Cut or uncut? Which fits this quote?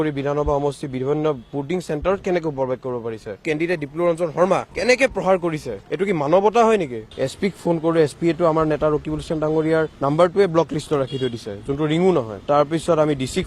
cut